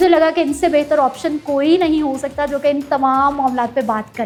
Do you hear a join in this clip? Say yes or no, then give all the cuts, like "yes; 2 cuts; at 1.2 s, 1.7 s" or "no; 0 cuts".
no; 0 cuts